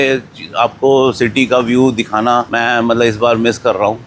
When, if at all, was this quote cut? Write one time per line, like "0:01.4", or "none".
0:02.5

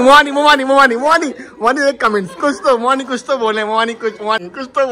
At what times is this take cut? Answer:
none

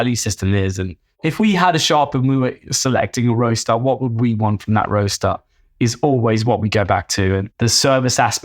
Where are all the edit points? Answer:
0:01.2
0:07.5

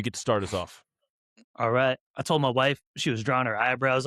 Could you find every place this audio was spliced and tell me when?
0:02.0

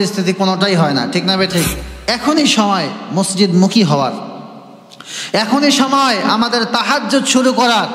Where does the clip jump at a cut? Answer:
0:01.9

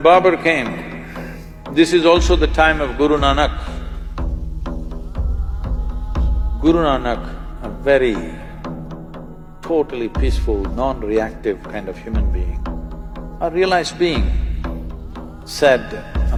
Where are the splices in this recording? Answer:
none

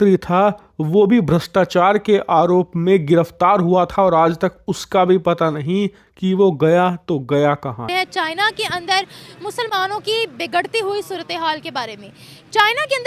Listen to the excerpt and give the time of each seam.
0:07.7

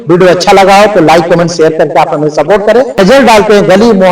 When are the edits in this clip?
0:03.0

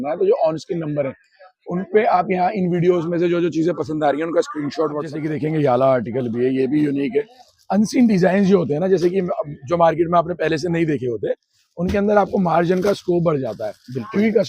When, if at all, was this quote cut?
0:05.0

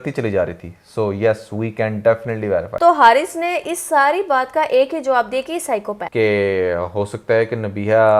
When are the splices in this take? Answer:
0:02.7
0:06.0

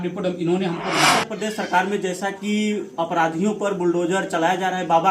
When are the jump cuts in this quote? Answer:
0:01.2

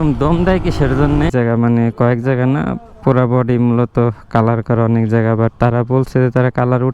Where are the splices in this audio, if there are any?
0:01.3

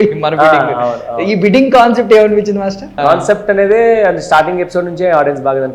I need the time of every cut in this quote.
0:02.9

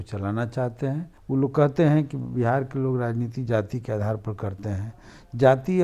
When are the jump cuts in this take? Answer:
0:01.1

